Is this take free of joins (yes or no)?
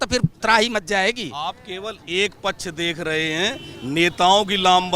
yes